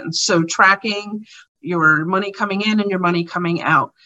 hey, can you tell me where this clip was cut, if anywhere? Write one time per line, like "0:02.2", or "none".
0:01.5